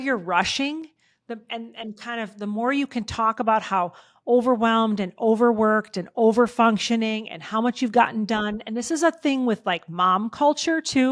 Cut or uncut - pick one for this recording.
uncut